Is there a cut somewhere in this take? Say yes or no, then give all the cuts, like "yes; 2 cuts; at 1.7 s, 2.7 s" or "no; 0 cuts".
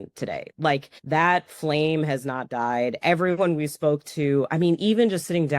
yes; 1 cut; at 0.9 s